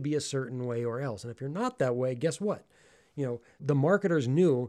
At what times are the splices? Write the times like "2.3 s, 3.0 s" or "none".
3.6 s